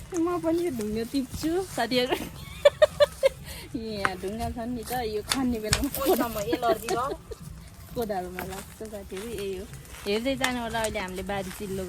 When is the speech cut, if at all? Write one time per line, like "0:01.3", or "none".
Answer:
none